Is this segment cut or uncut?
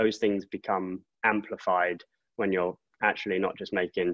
uncut